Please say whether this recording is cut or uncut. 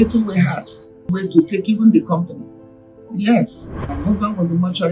cut